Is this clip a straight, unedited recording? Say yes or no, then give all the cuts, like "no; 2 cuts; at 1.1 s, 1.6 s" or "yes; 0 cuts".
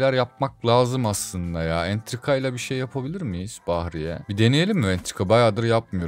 yes; 0 cuts